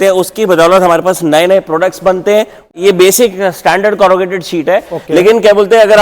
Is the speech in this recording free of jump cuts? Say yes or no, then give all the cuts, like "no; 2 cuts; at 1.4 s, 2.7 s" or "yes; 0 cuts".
no; 1 cut; at 2.7 s